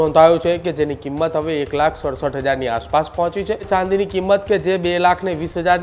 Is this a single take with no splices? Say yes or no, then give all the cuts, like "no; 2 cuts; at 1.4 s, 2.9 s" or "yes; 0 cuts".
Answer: no; 1 cut; at 3.7 s